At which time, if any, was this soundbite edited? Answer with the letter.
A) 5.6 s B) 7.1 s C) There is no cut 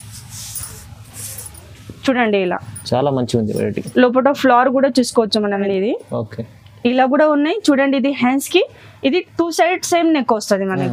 A